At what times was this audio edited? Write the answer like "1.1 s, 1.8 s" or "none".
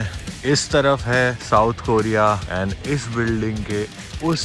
1.4 s, 2.5 s